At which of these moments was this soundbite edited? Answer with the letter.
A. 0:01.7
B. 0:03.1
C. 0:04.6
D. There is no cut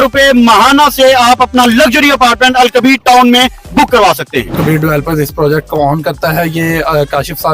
C